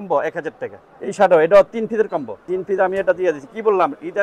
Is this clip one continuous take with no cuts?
no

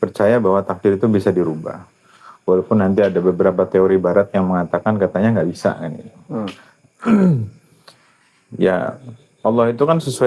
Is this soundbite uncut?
yes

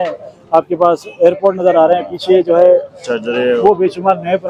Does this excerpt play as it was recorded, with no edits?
yes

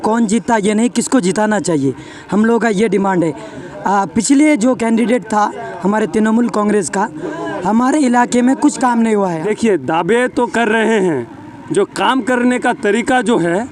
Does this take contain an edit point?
yes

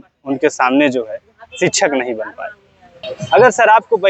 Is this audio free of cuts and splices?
no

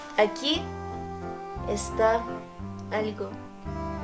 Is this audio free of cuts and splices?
yes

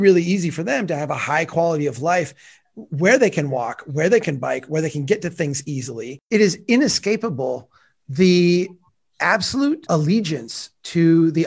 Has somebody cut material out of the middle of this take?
yes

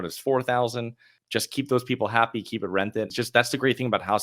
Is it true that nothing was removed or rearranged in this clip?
no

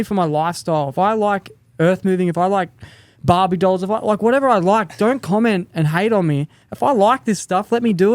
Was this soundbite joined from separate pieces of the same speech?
no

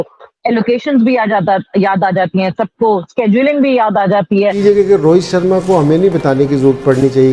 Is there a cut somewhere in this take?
yes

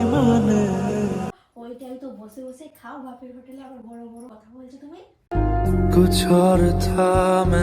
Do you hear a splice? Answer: yes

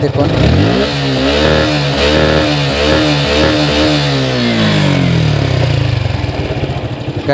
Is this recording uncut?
yes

